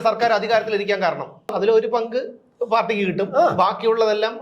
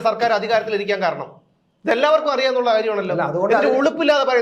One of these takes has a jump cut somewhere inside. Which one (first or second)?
first